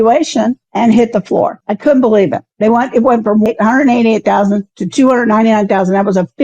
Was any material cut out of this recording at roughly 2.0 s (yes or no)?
no